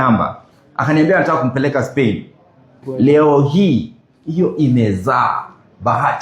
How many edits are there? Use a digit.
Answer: 1